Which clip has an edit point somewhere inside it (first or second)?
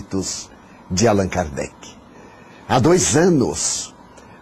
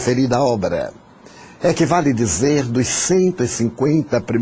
second